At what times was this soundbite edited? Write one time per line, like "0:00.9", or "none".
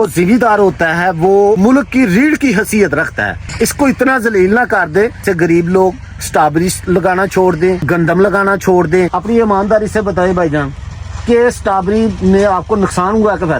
0:01.6
0:03.5
0:05.2
0:07.8
0:09.2